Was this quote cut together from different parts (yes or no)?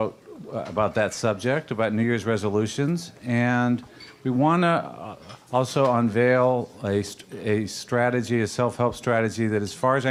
no